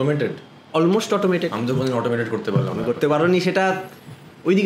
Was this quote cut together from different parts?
no; 0 cuts

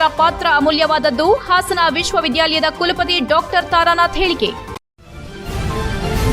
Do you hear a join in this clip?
yes; 1 cut; at 4.7 s

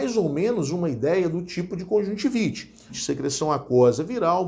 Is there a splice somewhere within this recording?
yes; 1 cut; at 2.9 s

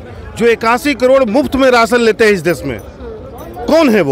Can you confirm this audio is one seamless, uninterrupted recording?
yes; 0 cuts

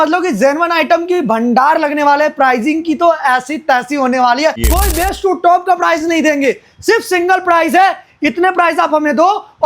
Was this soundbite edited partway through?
yes; 1 cut; at 4.7 s

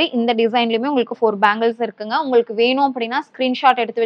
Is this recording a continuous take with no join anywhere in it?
yes; 0 cuts

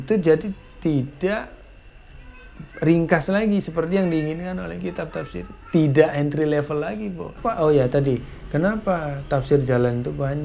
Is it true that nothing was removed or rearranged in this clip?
no; 1 cut; at 7.4 s

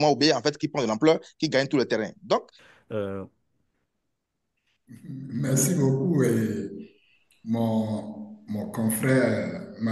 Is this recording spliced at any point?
yes; 1 cut; at 2.6 s

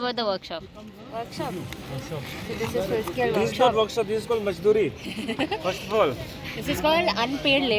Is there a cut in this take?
no; 0 cuts

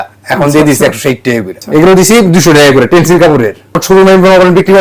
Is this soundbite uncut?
no; 2 cuts; at 1.6 s, 3.8 s

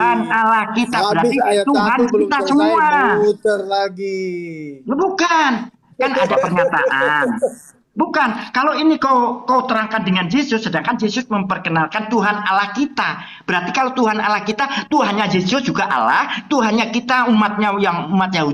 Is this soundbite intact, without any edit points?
yes; 0 cuts

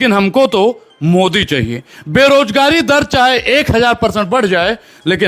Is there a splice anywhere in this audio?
no; 0 cuts

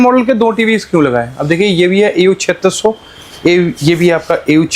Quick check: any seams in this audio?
no; 0 cuts

